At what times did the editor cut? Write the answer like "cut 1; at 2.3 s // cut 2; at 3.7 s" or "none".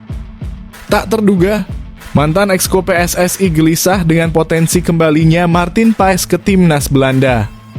cut 1; at 0.9 s